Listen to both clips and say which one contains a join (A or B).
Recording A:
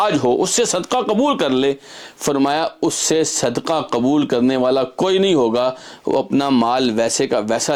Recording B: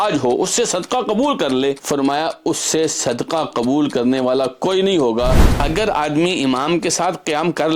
B